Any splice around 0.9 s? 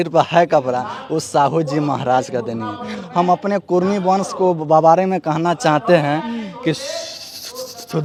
no; 0 cuts

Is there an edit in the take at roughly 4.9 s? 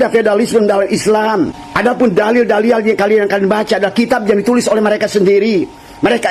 no; 2 cuts; at 1.6 s, 3.2 s

